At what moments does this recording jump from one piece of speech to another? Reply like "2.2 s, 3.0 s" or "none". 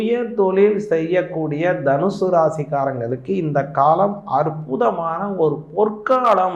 none